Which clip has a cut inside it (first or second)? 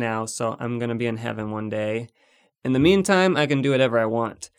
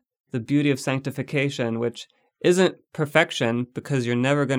first